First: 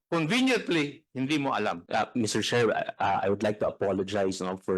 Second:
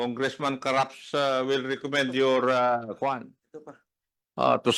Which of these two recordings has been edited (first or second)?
first